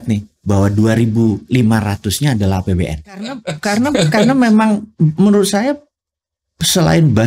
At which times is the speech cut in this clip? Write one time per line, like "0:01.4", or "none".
0:03.5